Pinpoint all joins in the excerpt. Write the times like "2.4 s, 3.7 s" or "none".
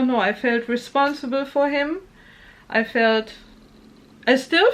none